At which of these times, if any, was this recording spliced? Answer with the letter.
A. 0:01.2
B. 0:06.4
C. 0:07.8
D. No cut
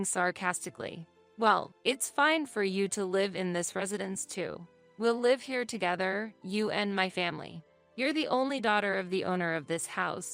A